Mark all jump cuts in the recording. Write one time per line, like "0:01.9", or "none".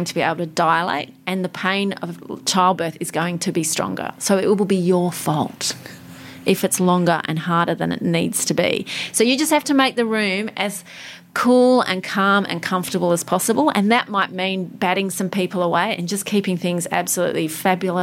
0:14.1